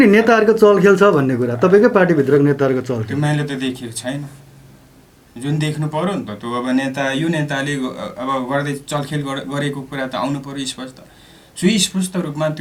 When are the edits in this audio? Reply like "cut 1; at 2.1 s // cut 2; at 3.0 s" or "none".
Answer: none